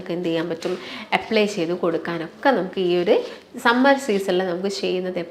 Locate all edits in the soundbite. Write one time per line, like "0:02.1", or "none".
none